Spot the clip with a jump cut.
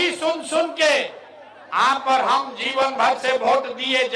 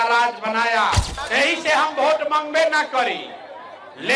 second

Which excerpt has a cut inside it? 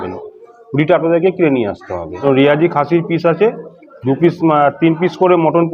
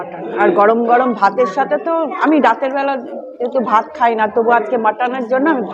first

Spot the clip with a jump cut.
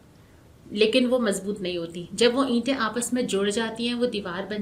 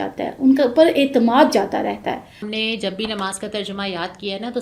second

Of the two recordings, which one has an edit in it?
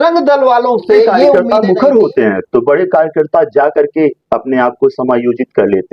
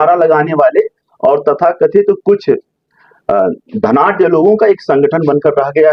first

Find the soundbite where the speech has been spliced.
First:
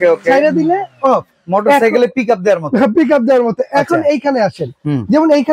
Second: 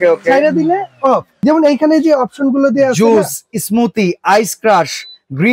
second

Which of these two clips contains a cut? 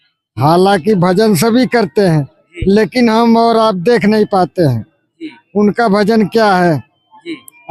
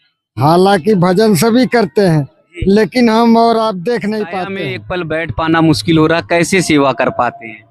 second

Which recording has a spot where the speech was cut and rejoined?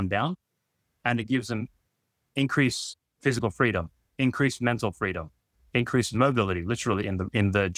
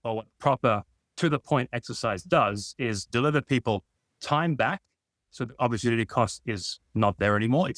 second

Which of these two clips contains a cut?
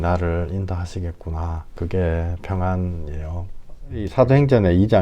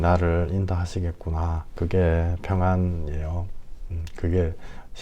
first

